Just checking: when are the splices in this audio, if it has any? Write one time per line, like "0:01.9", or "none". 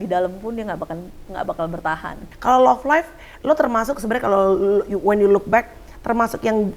0:02.2